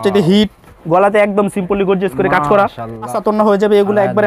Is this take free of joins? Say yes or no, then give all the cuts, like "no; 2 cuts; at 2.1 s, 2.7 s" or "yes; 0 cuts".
no; 1 cut; at 3.2 s